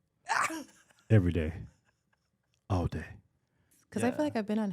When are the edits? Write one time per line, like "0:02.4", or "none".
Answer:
0:03.7